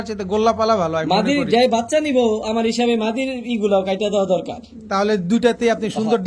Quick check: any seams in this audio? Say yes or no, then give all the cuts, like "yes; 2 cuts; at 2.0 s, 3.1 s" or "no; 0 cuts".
no; 0 cuts